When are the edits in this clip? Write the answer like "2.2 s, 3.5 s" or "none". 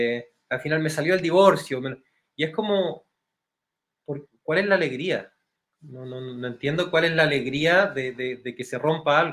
none